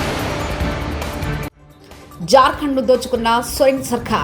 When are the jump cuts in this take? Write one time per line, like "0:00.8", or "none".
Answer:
0:01.2
0:02.1